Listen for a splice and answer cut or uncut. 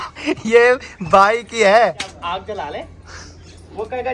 cut